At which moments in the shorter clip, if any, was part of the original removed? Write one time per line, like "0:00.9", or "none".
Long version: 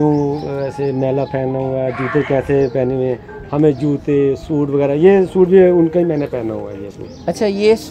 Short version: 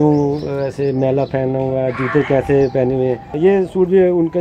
0:03.3